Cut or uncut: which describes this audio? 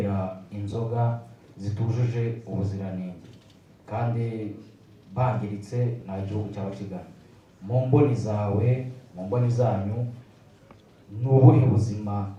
uncut